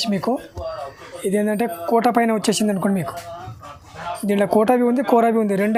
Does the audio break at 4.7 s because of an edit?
no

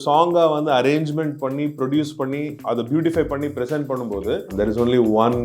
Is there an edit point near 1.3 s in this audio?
no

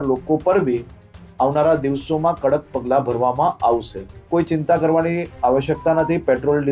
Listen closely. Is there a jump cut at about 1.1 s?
no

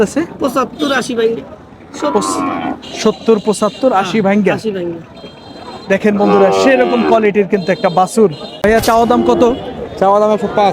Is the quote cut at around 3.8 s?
no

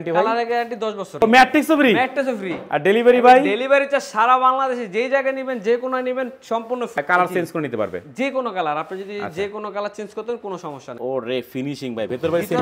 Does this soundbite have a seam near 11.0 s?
yes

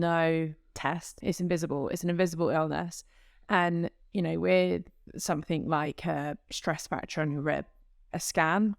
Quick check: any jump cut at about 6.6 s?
no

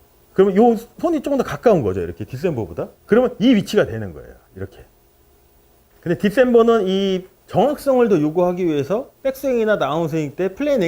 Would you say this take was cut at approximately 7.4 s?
no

